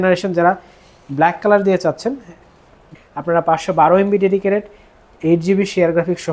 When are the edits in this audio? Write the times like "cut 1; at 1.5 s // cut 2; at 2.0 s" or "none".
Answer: cut 1; at 2.9 s